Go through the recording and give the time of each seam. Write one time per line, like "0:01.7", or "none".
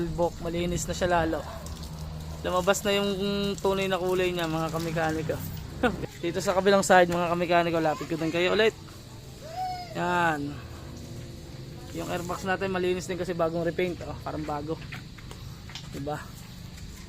0:06.0